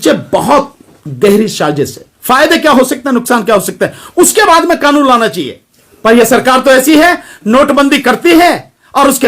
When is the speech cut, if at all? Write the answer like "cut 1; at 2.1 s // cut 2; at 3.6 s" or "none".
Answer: cut 1; at 2.1 s